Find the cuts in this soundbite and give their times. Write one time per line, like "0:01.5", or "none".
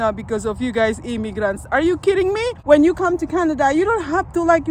0:02.5